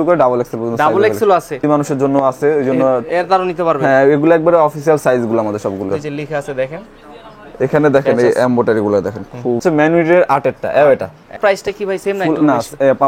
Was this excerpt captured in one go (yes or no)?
no